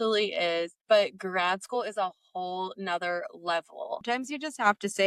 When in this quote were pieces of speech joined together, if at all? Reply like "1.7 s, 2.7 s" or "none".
4.0 s